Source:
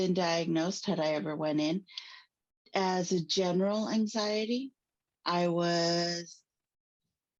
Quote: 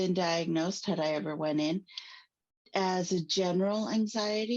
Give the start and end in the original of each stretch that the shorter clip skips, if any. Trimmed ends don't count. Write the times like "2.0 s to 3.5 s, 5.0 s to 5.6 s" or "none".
none